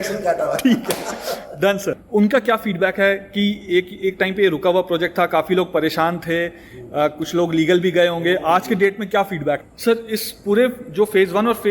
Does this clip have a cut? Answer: yes; 2 cuts; at 2.0 s, 9.7 s

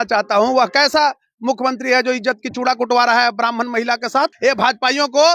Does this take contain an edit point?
yes; 1 cut; at 4.3 s

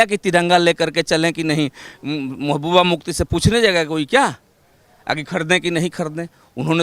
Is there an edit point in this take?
no; 0 cuts

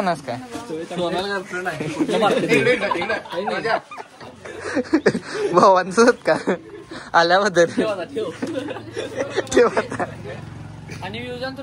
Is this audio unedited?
yes; 0 cuts

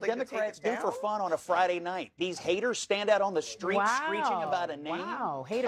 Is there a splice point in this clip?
no; 0 cuts

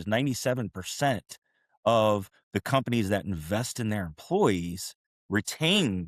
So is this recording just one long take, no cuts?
yes; 0 cuts

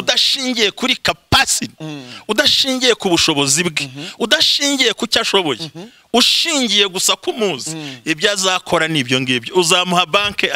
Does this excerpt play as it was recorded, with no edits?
yes; 0 cuts

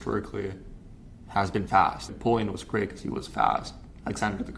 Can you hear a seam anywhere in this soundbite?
yes; 1 cut; at 2.1 s

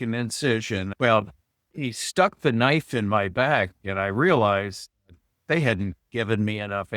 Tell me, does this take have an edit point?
yes; 1 cut; at 0.9 s

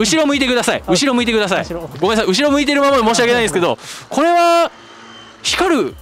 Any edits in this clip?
no; 0 cuts

